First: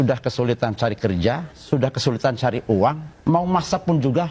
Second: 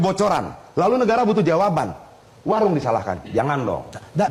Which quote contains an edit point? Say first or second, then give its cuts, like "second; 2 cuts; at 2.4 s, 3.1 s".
first; 2 cuts; at 1.5 s, 3.1 s